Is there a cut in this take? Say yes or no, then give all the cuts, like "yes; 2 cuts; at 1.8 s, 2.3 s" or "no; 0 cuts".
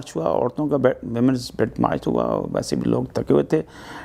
no; 0 cuts